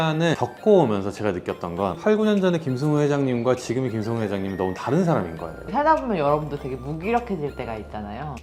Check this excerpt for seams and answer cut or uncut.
cut